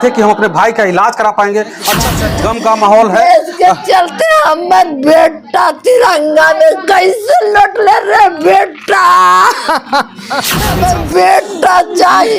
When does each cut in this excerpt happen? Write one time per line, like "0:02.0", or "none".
0:02.2
0:10.6